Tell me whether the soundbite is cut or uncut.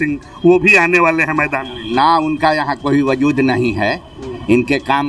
uncut